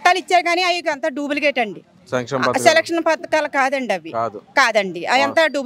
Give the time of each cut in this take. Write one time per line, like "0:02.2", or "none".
none